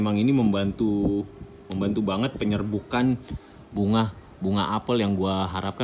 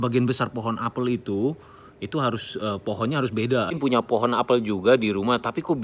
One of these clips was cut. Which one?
second; 1 cut; at 3.8 s

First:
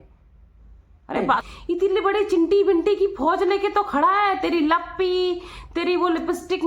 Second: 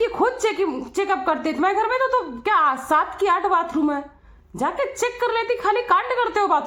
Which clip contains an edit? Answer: first; 1 cut; at 1.4 s

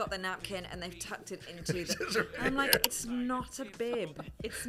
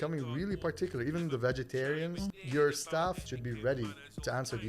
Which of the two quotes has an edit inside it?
second; 2 cuts; at 2.3 s, 3.2 s

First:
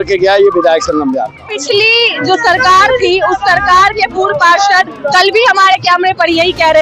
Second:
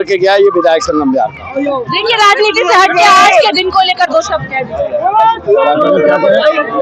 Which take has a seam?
first; 1 cut; at 1.5 s

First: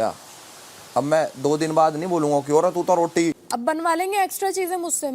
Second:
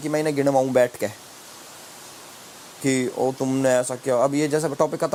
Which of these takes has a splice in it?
first; 1 cut; at 3.5 s

